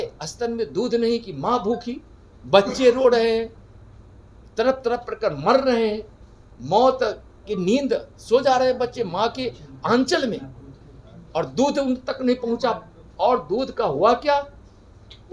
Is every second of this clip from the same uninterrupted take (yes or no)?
yes